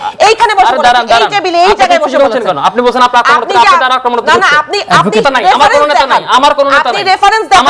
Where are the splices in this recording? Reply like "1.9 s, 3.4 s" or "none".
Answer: 5.2 s